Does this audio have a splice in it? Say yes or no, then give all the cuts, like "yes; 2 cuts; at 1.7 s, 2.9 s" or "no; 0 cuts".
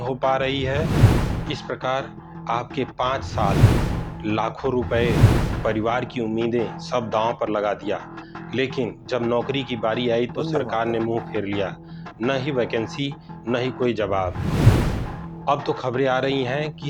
no; 0 cuts